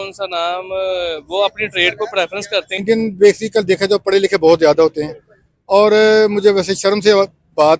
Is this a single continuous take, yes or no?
no